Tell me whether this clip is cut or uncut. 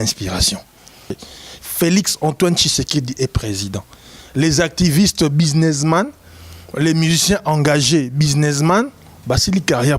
cut